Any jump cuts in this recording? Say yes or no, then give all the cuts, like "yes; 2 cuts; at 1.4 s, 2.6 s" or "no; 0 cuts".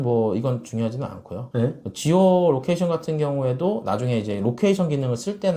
no; 0 cuts